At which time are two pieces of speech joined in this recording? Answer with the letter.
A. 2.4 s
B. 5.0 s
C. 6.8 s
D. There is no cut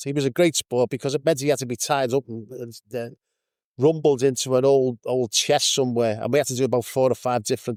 D